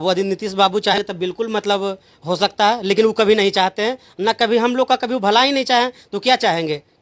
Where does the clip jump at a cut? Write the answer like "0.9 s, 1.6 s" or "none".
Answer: 1.0 s